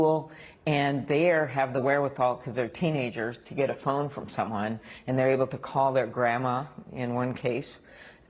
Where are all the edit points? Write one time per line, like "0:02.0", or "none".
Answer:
0:01.5
0:07.2